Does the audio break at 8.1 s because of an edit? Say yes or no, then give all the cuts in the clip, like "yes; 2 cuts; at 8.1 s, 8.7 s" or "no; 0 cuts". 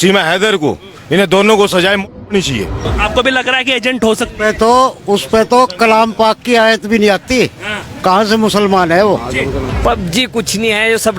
no; 2 cuts; at 2.8 s, 9.7 s